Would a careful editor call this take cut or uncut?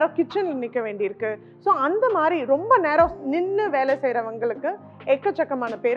uncut